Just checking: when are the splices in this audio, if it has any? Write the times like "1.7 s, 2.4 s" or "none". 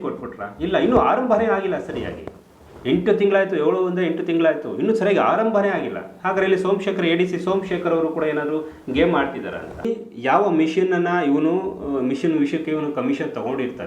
9.8 s

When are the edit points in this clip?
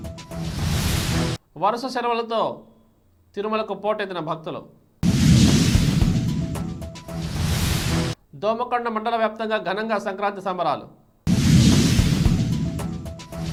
none

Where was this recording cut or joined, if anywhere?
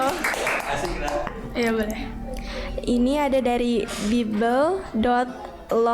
1.3 s

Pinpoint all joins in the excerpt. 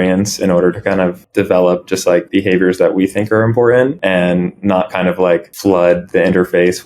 1.2 s, 2.3 s, 4.0 s, 5.5 s

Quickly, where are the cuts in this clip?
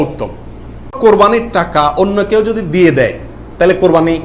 1.0 s

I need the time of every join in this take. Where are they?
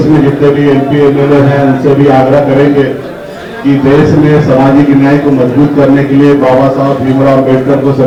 none

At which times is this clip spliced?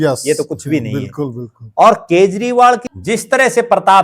2.9 s

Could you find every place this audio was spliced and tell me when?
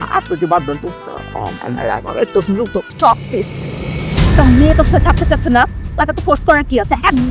2.9 s

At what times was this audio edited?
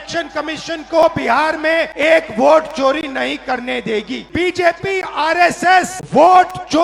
1.9 s, 4.3 s, 6.0 s

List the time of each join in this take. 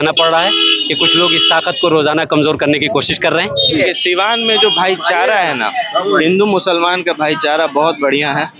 3.8 s

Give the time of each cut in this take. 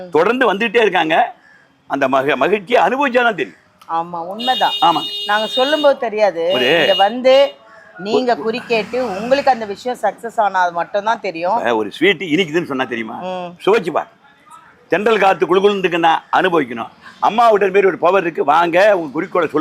none

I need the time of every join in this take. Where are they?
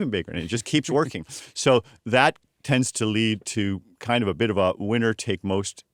none

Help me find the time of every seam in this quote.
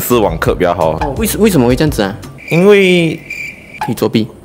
none

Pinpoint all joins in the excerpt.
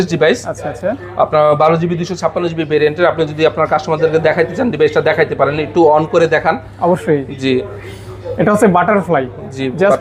none

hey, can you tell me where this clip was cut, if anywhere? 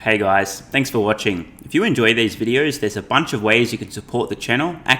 none

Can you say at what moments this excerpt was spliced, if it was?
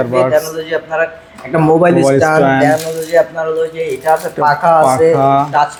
none

